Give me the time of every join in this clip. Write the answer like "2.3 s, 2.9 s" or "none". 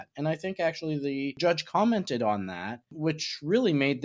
1.4 s, 2.9 s